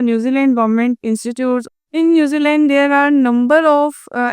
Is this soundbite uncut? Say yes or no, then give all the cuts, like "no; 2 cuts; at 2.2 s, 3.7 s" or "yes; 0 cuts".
no; 1 cut; at 1.7 s